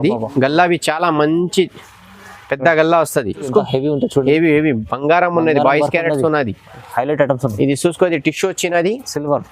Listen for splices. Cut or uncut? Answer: cut